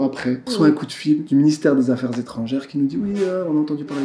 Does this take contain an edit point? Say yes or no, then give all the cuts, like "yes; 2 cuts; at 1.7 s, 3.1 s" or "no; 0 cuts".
no; 0 cuts